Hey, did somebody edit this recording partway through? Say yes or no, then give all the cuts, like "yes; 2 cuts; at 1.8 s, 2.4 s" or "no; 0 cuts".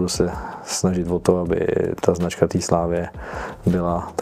no; 0 cuts